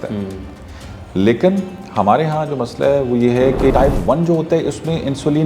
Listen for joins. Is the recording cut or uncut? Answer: cut